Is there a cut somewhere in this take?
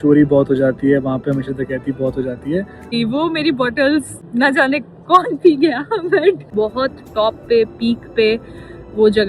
yes; 3 cuts; at 2.9 s, 4.2 s, 6.5 s

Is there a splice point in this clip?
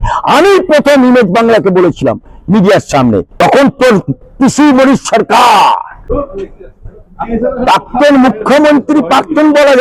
yes; 2 cuts; at 3.3 s, 6.0 s

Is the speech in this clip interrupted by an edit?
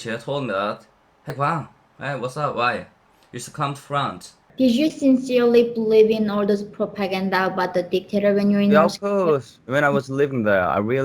yes; 1 cut; at 4.4 s

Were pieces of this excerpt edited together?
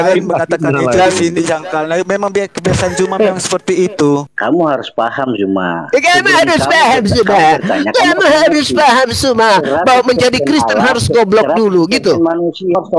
yes; 1 cut; at 4.3 s

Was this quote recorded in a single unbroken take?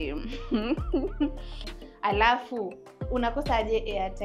no; 1 cut; at 1.8 s

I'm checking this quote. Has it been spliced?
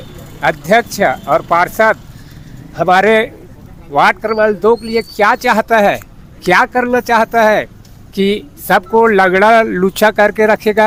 no; 0 cuts

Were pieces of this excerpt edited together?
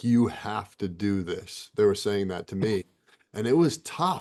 no; 0 cuts

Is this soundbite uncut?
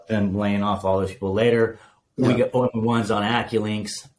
yes; 0 cuts

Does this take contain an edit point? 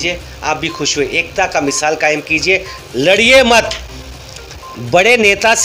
no; 0 cuts

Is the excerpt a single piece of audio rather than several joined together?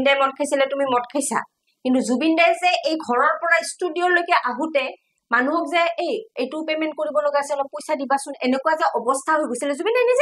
yes; 0 cuts

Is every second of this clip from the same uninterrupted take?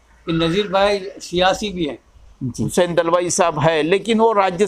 no; 1 cut; at 2.7 s

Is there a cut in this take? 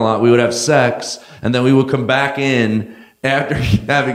yes; 1 cut; at 3.0 s

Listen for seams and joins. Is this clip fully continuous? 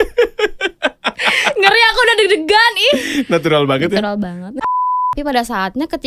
no; 1 cut; at 4.7 s

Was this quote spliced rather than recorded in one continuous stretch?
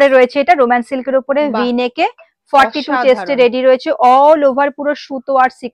no; 0 cuts

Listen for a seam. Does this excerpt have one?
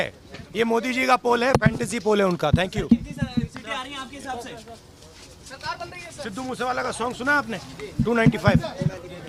no; 0 cuts

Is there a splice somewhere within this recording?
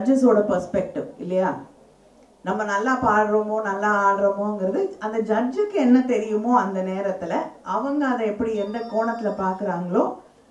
no; 0 cuts

